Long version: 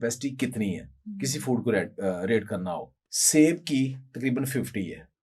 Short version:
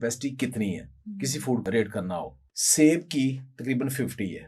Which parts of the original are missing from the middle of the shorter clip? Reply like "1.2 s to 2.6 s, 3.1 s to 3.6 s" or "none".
1.6 s to 2.2 s